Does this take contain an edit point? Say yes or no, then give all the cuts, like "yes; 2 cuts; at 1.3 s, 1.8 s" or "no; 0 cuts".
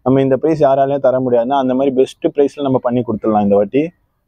no; 0 cuts